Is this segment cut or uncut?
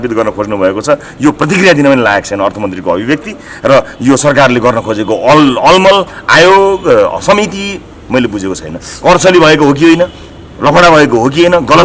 uncut